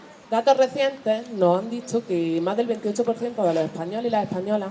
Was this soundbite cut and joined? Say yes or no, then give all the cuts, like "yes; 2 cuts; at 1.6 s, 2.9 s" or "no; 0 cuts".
yes; 1 cut; at 1.5 s